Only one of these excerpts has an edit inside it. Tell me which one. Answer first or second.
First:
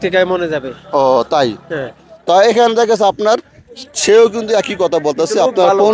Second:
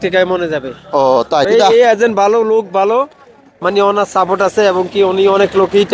second